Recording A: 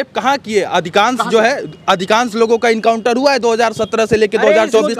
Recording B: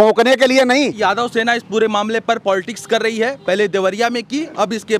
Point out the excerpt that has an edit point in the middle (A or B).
B